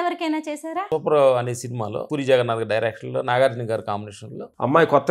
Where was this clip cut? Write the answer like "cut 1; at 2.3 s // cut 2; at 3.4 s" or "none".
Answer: cut 1; at 0.8 s // cut 2; at 2.0 s